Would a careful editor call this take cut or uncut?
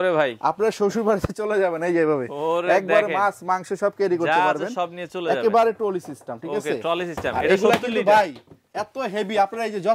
uncut